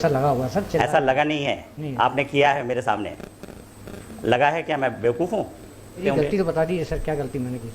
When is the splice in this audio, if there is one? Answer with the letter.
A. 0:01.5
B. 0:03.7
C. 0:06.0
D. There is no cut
C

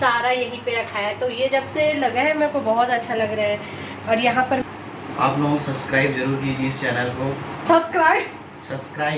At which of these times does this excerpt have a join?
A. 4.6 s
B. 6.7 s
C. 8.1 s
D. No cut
A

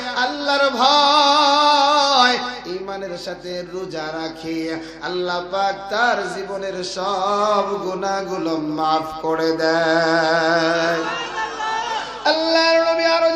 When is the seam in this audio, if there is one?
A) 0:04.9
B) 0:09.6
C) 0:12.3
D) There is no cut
D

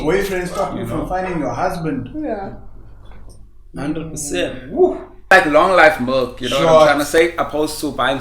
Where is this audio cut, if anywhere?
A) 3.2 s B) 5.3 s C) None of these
B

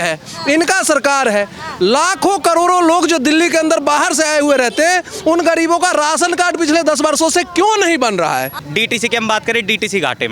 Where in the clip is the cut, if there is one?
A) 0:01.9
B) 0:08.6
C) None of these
B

